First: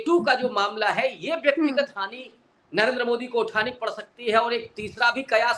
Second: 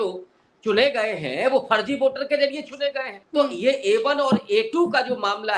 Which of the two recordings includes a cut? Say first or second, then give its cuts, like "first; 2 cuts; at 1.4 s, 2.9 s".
second; 1 cut; at 3.1 s